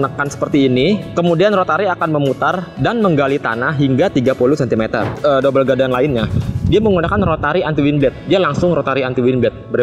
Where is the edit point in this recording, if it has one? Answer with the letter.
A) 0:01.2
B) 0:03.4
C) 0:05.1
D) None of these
C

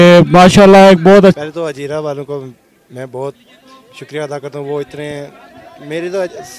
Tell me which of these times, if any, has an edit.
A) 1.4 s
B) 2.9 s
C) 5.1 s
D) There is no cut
A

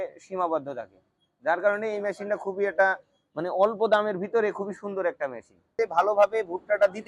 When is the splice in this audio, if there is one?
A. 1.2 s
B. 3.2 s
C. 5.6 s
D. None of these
C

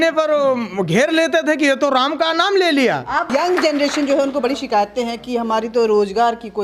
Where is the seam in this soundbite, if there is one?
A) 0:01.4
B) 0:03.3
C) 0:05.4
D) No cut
B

